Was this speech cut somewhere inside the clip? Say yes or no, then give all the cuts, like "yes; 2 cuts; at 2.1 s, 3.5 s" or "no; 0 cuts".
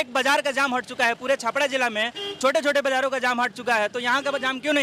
no; 0 cuts